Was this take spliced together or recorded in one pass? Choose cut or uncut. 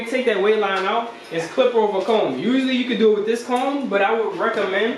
uncut